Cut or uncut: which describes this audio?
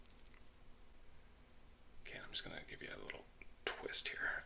cut